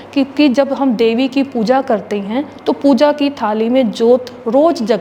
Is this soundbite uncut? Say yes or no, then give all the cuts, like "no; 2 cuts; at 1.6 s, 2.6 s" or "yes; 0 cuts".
yes; 0 cuts